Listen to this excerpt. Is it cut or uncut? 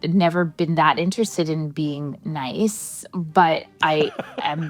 uncut